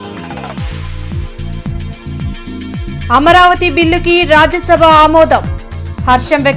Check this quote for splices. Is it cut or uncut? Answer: cut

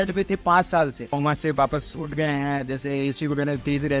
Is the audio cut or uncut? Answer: cut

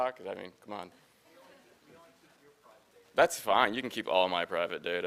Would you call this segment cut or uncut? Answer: uncut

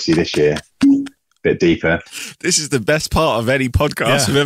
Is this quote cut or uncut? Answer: cut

